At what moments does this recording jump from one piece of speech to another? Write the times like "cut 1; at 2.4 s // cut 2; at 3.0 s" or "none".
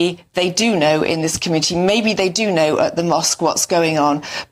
none